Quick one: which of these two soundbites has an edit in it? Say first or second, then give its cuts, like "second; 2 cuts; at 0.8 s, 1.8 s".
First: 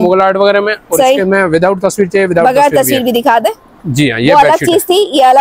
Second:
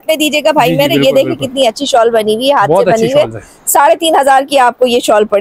first; 1 cut; at 3.9 s